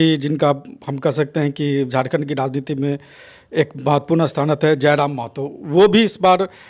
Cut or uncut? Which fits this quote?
uncut